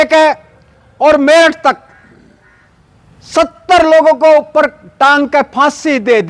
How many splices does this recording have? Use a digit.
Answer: 0